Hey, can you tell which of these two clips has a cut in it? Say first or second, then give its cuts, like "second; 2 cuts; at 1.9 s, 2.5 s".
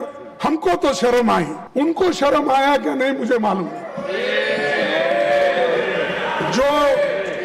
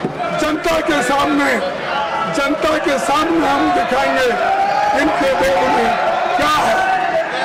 first; 1 cut; at 1.6 s